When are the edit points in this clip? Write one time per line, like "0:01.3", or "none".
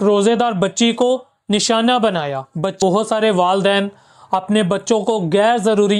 0:02.8